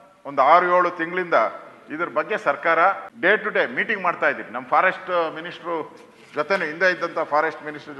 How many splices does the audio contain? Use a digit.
1